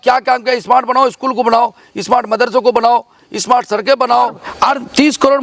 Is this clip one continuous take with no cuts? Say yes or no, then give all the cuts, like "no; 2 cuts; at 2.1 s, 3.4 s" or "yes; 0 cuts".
no; 1 cut; at 4.4 s